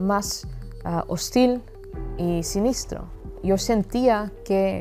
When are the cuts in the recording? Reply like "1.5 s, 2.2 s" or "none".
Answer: 3.2 s